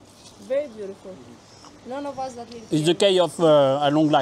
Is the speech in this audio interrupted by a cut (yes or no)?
no